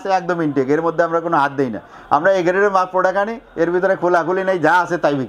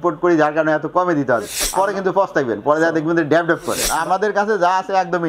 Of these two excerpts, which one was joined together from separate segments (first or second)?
second